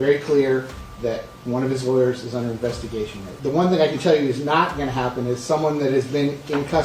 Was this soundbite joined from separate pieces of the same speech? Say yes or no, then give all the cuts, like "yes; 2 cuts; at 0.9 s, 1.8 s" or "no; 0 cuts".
yes; 1 cut; at 3.3 s